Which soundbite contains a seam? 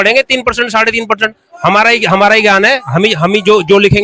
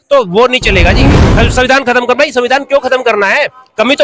second; 1 cut; at 1.1 s

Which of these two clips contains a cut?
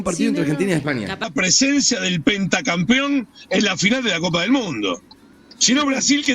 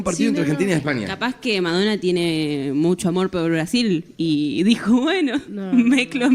first; 1 cut; at 1.2 s

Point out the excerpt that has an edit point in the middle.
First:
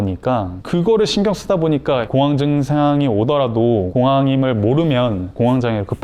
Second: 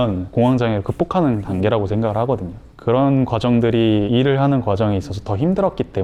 first; 2 cuts; at 2.1 s, 3.9 s

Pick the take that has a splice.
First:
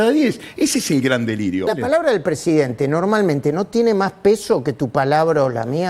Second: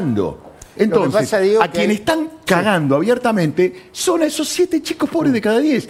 first; 1 cut; at 1.7 s

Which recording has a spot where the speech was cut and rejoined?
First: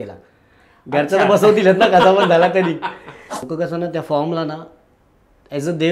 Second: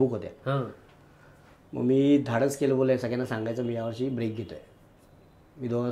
first; 1 cut; at 3.4 s

